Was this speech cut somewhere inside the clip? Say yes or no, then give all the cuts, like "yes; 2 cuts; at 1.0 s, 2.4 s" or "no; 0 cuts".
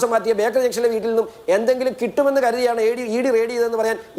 no; 0 cuts